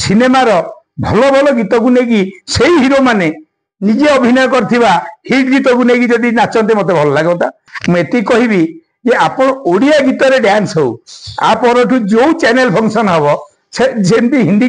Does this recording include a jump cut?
yes; 1 cut; at 7.7 s

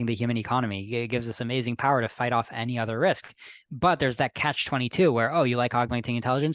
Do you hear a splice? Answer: no; 0 cuts

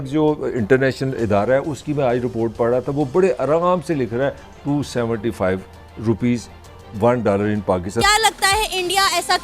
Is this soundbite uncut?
no; 1 cut; at 8.0 s

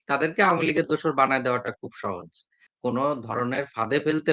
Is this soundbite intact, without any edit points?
no; 1 cut; at 2.7 s

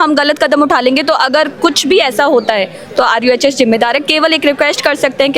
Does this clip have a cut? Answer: no; 0 cuts

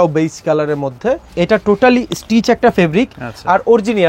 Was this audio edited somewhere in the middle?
yes; 1 cut; at 1.3 s

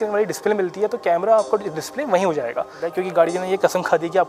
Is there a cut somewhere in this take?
yes; 1 cut; at 2.8 s

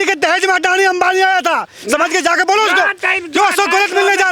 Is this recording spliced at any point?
no; 0 cuts

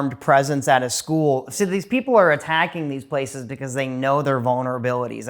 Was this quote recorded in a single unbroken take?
yes; 0 cuts

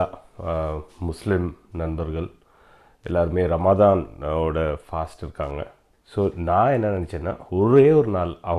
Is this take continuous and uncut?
yes; 0 cuts

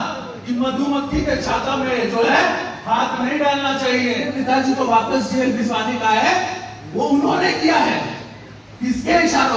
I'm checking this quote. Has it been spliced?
yes; 1 cut; at 4.2 s

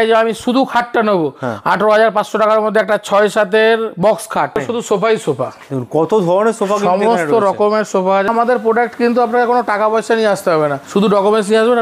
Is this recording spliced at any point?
yes; 3 cuts; at 4.6 s, 8.3 s, 10.8 s

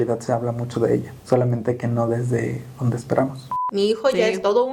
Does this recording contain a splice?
yes; 2 cuts; at 1.1 s, 3.6 s

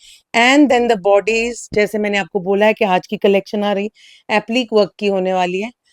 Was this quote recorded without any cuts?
yes; 0 cuts

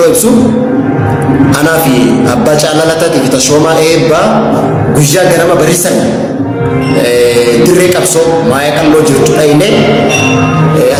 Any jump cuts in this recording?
no; 0 cuts

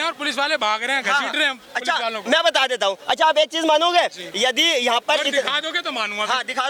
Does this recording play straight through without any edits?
yes; 0 cuts

